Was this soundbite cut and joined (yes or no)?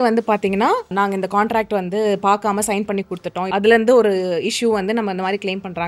yes